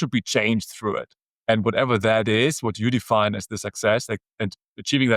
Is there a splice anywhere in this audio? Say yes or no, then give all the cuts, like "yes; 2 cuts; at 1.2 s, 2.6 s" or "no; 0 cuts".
no; 0 cuts